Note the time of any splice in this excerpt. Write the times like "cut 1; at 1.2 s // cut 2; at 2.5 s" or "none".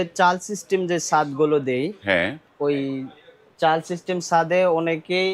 none

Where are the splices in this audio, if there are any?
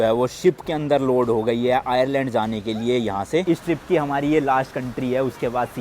none

